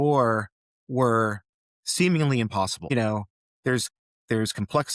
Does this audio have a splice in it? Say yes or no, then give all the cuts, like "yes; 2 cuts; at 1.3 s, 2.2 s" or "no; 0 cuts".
yes; 1 cut; at 2.8 s